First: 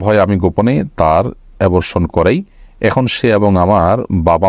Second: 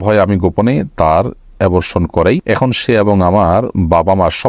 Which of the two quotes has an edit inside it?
second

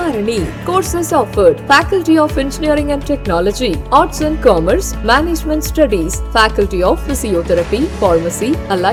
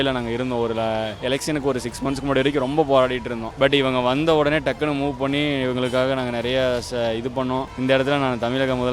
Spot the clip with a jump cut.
second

